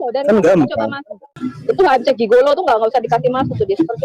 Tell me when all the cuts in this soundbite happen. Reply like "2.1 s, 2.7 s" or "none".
1.3 s